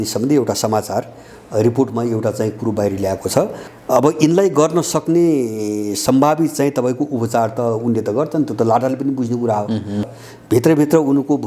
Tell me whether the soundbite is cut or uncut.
cut